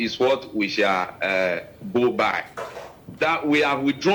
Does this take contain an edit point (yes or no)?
yes